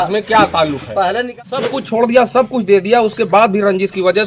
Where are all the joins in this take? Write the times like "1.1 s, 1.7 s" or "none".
1.4 s